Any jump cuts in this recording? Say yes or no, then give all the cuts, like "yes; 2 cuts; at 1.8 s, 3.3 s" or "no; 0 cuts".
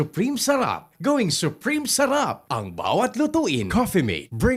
yes; 1 cut; at 3.7 s